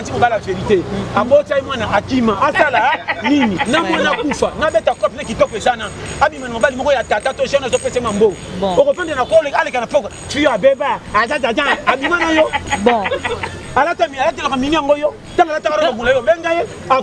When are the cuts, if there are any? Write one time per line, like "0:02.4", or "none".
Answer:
0:03.6